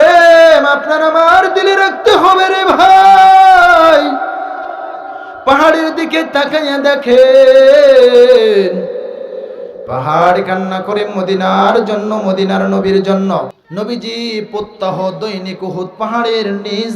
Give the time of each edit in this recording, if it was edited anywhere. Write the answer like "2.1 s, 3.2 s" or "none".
13.6 s